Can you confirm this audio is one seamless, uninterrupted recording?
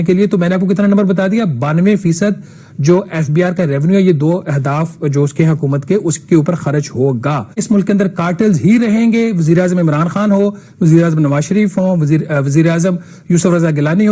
no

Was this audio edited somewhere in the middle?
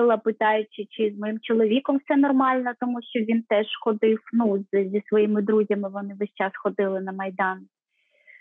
no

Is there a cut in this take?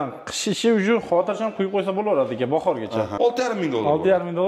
yes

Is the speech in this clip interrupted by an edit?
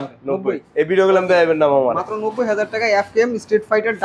no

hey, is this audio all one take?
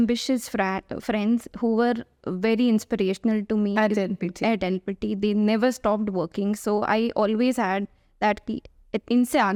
yes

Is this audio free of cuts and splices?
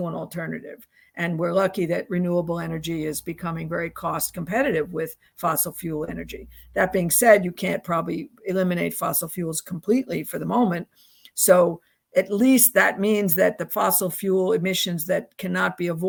yes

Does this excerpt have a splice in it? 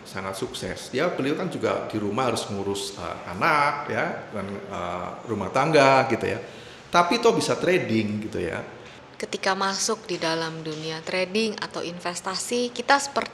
yes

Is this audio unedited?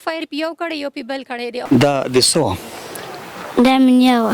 no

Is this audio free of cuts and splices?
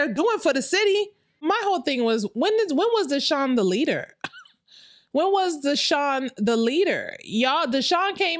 no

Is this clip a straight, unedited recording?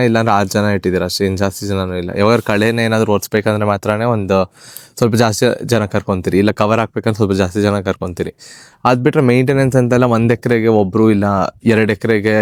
yes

